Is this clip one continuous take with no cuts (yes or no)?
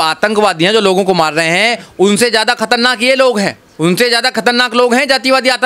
yes